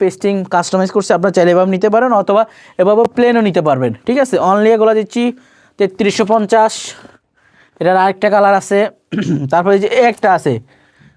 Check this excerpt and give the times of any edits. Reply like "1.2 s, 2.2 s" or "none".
none